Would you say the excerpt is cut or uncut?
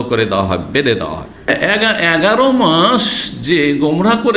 cut